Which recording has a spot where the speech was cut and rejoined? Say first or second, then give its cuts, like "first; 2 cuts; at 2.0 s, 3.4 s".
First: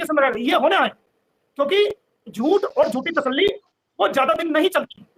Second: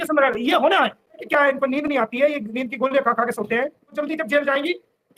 second; 2 cuts; at 1.2 s, 4.0 s